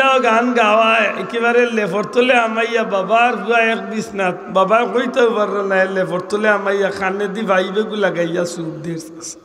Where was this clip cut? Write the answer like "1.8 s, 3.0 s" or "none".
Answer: none